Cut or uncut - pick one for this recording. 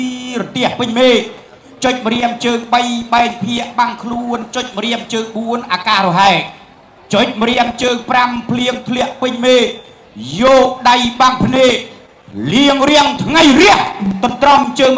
uncut